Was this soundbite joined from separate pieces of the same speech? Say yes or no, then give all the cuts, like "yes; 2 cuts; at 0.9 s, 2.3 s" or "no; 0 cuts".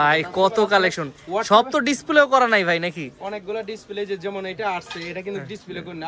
no; 0 cuts